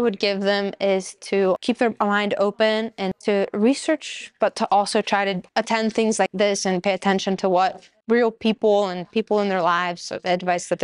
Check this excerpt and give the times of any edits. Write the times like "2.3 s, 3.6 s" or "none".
1.6 s, 3.1 s, 5.4 s, 6.3 s, 8.0 s